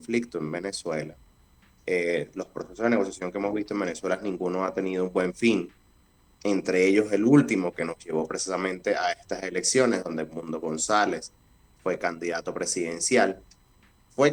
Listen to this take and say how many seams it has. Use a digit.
0